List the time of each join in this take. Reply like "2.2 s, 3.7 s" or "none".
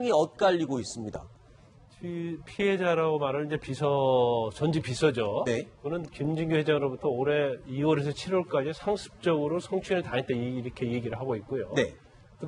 9.8 s